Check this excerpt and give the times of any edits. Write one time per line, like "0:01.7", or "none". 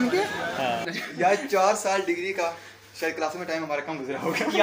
0:00.9